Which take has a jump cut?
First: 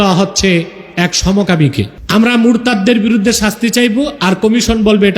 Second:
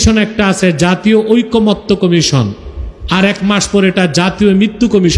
first; 1 cut; at 2.0 s

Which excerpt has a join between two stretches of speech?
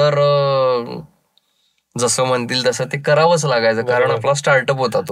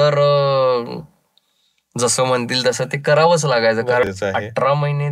second; 1 cut; at 4.0 s

